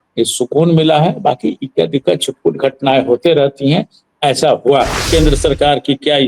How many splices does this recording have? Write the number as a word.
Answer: one